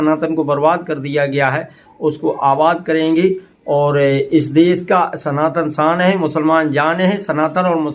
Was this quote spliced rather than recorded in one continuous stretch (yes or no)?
no